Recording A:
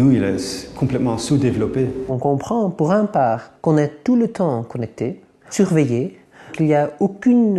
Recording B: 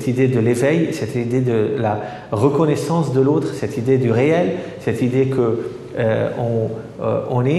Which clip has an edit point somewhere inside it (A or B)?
A